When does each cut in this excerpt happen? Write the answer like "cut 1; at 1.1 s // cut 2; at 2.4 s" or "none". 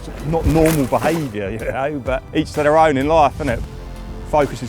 cut 1; at 2.3 s // cut 2; at 3.6 s

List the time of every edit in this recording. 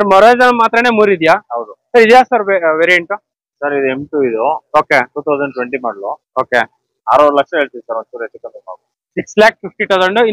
none

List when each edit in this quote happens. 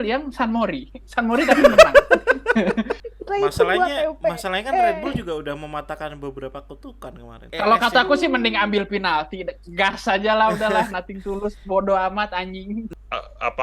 cut 1; at 3.0 s // cut 2; at 7.5 s // cut 3; at 12.9 s

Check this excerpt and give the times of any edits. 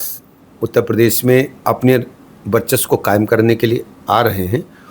cut 1; at 1.6 s

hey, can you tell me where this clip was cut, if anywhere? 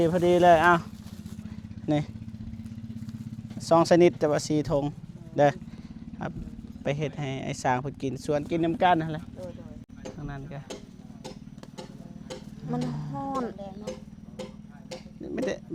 none

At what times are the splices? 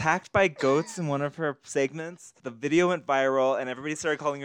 cut 1; at 2.4 s

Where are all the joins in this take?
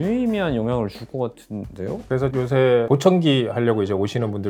none

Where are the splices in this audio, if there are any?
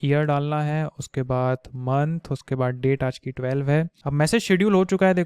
cut 1; at 4.0 s

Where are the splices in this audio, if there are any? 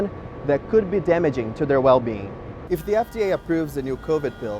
cut 1; at 2.6 s

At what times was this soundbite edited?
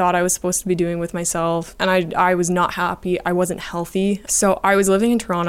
cut 1; at 1.7 s // cut 2; at 4.3 s

